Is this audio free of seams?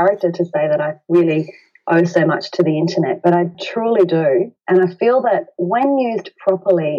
no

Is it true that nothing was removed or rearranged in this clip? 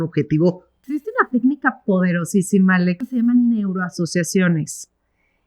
no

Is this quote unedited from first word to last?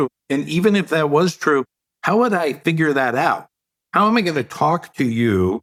yes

